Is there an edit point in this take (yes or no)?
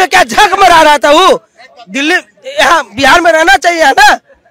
no